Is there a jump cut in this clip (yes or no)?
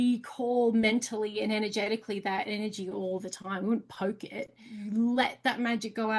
yes